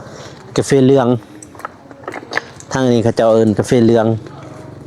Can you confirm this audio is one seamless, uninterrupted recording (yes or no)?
yes